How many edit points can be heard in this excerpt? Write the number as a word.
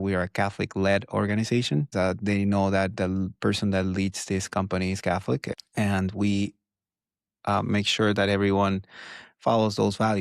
two